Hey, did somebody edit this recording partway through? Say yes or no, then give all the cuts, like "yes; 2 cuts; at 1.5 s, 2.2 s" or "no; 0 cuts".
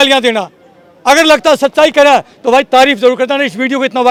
no; 0 cuts